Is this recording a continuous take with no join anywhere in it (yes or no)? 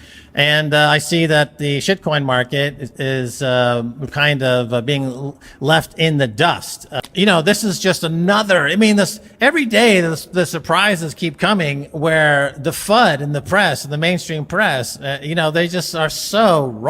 no